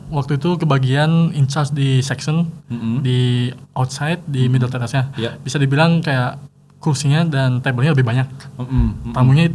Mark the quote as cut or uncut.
uncut